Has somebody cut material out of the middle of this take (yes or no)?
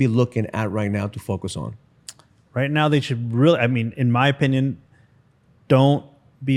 no